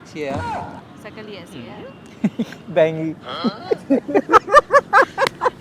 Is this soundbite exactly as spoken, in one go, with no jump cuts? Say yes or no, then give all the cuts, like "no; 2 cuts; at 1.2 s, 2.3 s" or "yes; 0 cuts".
no; 1 cut; at 3.9 s